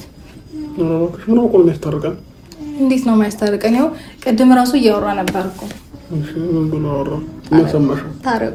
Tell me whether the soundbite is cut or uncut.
uncut